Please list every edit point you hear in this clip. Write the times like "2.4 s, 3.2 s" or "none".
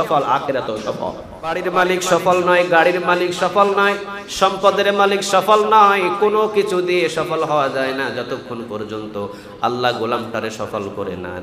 1.6 s